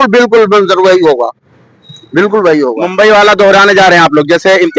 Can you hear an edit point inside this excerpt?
no; 0 cuts

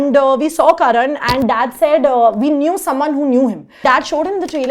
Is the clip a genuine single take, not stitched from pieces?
no; 1 cut; at 3.8 s

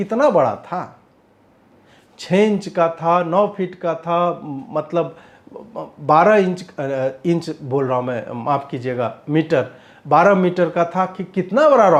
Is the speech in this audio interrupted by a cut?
no; 0 cuts

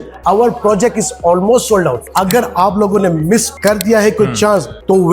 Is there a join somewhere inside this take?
yes; 1 cut; at 2.0 s

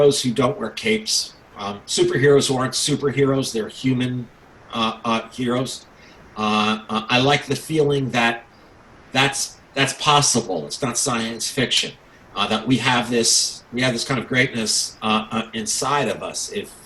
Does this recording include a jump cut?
no; 0 cuts

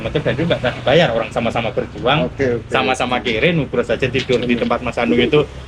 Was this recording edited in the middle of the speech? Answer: no; 0 cuts

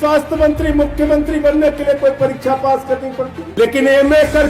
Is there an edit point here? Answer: yes; 1 cut; at 3.4 s

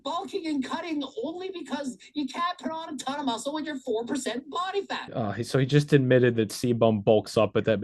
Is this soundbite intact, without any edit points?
yes; 0 cuts

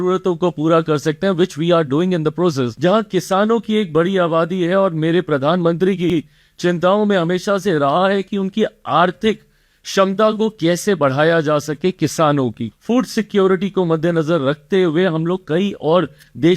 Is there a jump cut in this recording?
yes; 2 cuts; at 2.7 s, 12.7 s

